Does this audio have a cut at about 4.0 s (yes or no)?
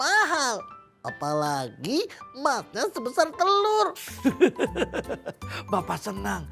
yes